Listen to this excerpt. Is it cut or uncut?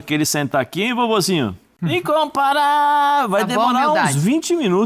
cut